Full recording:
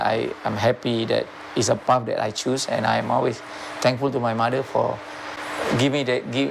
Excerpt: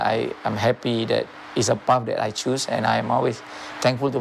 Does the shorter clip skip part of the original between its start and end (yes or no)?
no